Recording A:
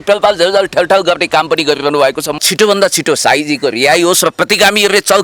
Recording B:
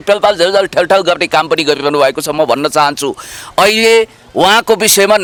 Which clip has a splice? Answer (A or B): A